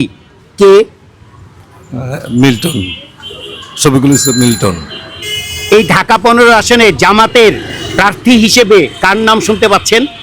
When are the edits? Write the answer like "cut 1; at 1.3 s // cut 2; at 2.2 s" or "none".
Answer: none